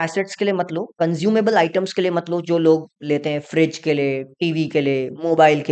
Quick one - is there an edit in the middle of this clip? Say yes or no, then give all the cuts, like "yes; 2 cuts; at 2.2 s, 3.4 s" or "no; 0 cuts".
no; 0 cuts